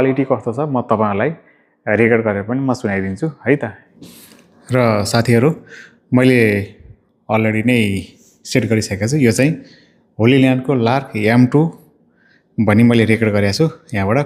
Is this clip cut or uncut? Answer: uncut